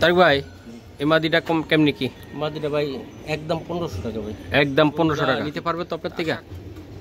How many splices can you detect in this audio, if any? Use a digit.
1